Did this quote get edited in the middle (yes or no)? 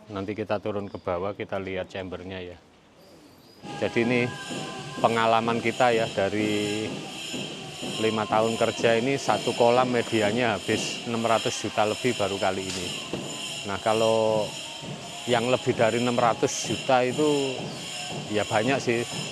yes